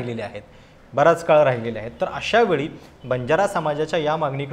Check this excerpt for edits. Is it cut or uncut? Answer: uncut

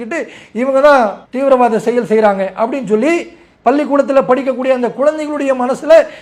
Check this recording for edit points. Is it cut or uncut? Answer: uncut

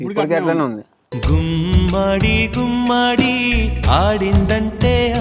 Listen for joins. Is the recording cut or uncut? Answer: uncut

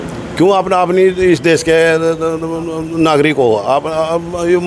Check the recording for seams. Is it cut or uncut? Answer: uncut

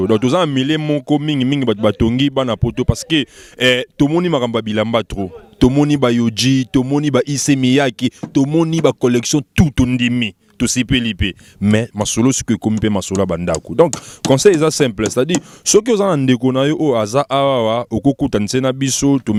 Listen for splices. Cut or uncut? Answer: uncut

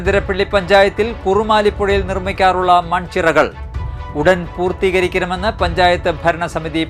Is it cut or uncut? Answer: uncut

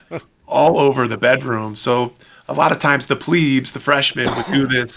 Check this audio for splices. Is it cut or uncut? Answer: uncut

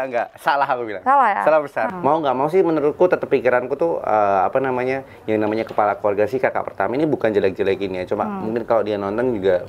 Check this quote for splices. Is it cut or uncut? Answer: cut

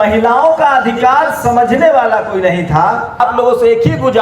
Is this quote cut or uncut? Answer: cut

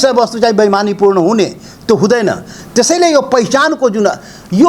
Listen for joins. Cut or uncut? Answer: uncut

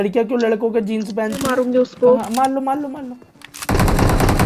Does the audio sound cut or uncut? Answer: cut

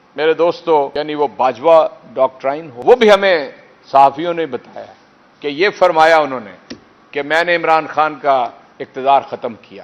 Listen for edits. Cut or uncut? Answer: cut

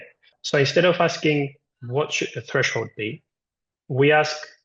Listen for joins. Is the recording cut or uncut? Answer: uncut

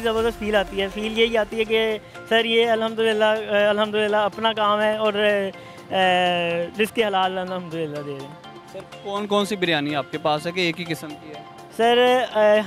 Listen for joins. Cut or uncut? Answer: uncut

